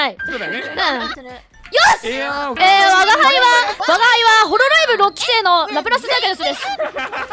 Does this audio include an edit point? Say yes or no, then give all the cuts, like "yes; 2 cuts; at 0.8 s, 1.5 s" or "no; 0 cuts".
yes; 2 cuts; at 1.2 s, 2.5 s